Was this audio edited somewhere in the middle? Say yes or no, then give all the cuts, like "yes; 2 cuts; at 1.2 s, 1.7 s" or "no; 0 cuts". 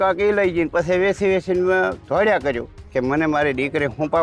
yes; 1 cut; at 2.8 s